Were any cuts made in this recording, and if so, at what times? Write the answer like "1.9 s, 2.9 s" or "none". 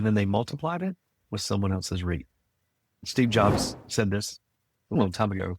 3.0 s